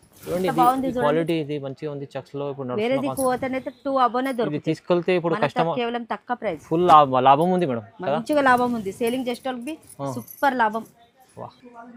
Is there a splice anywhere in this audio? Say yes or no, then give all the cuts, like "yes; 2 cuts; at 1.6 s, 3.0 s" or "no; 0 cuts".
no; 0 cuts